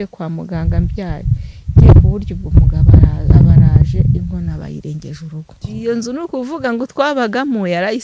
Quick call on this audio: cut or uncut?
cut